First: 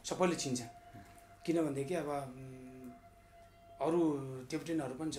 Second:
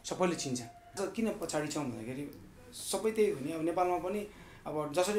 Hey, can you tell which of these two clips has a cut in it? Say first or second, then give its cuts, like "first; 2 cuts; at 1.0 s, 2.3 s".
second; 1 cut; at 1.0 s